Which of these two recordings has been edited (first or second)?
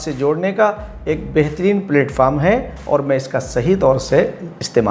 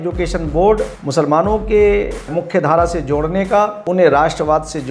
second